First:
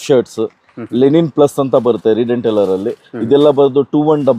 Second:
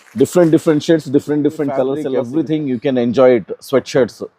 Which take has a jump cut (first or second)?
second